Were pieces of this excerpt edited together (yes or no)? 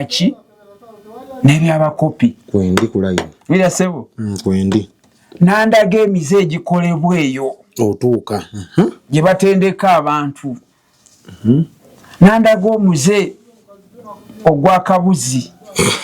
no